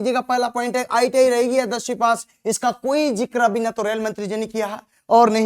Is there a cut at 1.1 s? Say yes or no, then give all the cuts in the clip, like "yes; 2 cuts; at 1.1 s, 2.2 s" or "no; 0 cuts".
no; 0 cuts